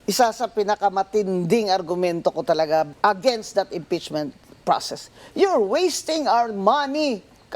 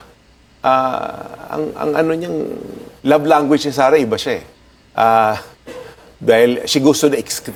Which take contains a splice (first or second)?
first